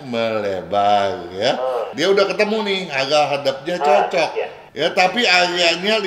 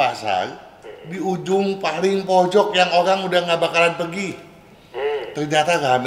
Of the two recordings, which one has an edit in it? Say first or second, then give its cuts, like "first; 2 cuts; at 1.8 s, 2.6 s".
first; 2 cuts; at 1.9 s, 4.6 s